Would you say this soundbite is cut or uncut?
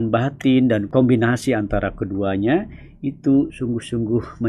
uncut